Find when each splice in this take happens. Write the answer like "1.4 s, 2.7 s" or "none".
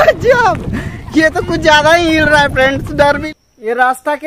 3.2 s